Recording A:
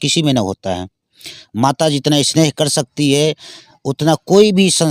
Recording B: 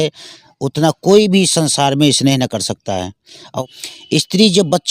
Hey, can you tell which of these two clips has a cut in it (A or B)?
B